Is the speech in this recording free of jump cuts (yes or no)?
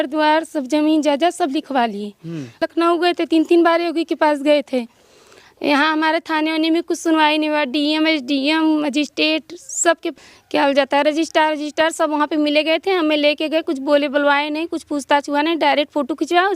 no